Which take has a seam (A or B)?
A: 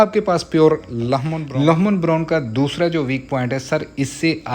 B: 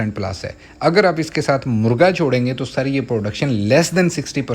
A